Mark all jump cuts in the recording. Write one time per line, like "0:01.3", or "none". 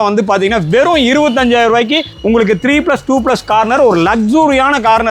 none